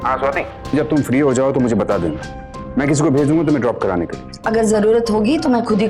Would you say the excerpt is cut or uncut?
cut